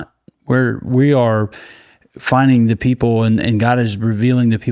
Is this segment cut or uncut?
uncut